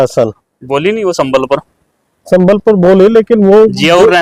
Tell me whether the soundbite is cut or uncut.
uncut